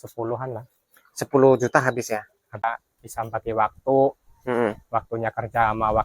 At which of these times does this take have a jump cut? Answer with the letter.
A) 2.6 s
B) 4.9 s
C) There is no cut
A